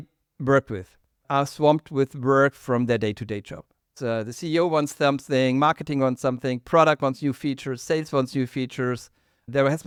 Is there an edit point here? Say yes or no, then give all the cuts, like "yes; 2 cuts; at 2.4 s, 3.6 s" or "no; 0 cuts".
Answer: no; 0 cuts